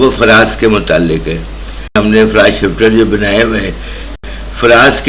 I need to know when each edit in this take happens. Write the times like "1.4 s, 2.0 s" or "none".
2.0 s, 4.2 s